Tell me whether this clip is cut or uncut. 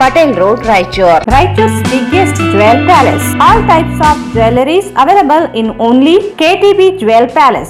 cut